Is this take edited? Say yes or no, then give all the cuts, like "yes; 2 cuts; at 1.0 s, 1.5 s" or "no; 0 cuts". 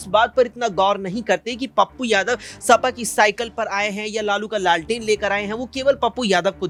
no; 0 cuts